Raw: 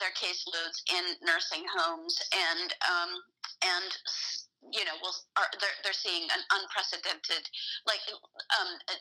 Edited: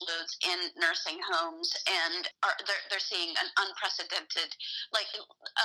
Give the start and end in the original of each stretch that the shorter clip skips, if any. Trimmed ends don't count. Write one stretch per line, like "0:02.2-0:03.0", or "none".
0:02.7-0:05.2